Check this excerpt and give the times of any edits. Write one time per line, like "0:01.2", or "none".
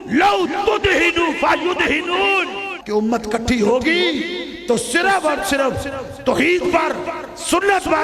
0:02.7